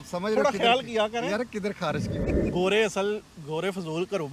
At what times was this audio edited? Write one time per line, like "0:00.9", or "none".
0:02.1